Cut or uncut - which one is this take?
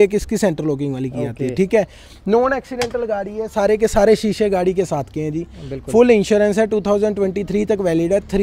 uncut